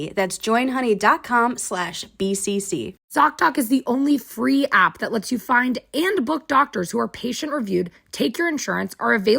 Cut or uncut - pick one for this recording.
cut